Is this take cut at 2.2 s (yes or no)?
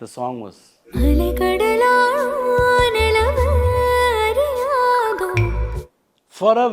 no